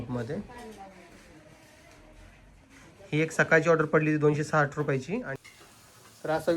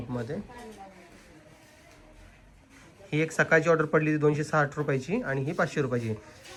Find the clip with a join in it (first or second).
first